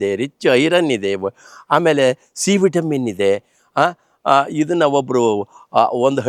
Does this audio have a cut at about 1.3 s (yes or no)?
no